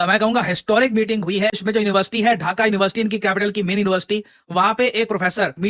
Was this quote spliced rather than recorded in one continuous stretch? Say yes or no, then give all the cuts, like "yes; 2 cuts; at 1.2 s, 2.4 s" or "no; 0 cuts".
yes; 1 cut; at 1.6 s